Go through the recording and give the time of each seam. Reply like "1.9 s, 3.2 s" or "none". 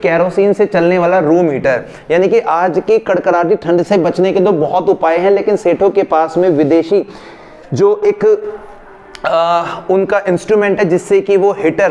none